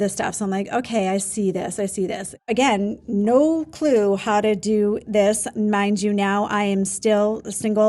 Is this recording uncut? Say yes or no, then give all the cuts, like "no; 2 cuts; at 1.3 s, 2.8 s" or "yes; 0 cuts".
no; 1 cut; at 2.3 s